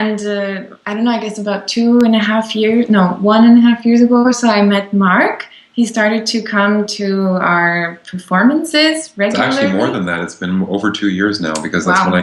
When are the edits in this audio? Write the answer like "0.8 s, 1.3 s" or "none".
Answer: none